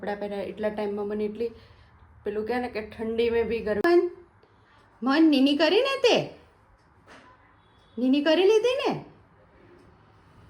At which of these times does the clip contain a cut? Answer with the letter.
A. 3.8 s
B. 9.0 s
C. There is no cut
A